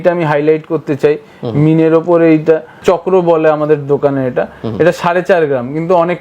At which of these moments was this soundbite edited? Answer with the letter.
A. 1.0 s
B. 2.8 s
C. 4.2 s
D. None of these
B